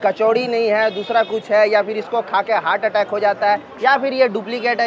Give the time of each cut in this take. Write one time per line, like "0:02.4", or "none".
none